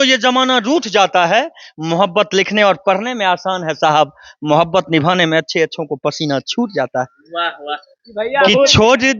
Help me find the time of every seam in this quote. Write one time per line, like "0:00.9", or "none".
none